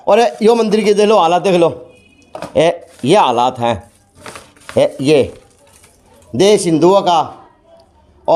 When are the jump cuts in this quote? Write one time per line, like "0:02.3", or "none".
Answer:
none